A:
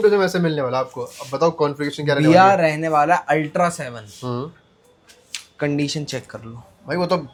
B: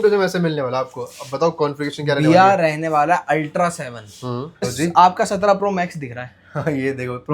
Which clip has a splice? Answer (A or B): B